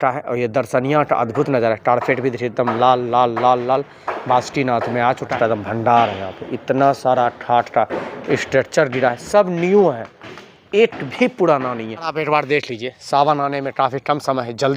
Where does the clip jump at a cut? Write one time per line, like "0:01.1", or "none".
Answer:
0:05.3
0:12.1